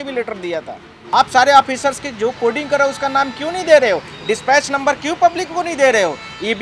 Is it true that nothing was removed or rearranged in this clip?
no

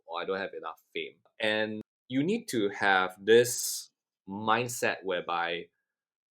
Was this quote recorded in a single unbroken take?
no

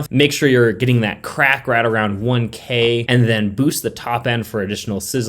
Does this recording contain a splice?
yes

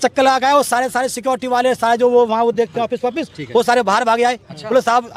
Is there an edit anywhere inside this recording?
no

